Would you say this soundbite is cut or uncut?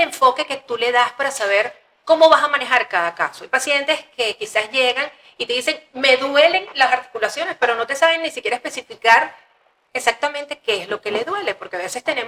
uncut